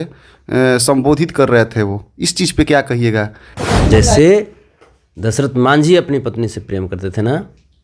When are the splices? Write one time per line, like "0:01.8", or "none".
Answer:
0:03.5